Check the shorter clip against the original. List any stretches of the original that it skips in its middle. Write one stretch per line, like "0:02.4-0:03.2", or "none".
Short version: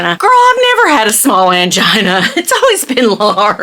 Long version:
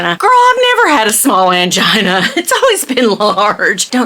none